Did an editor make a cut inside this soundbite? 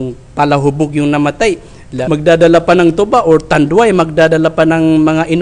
yes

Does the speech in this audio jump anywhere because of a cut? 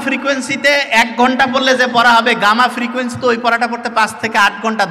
no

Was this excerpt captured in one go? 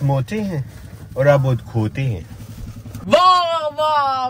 yes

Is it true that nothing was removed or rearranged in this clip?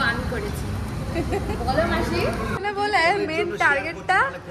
no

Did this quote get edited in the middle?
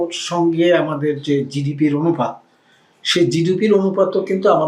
no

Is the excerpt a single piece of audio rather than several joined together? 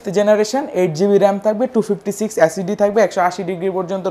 yes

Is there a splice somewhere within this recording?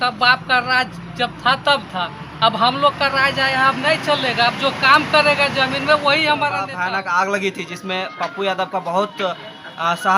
yes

